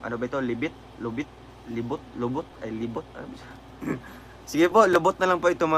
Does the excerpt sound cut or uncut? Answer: cut